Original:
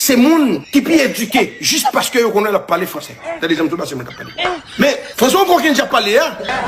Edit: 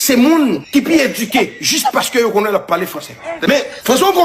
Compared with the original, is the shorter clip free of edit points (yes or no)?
no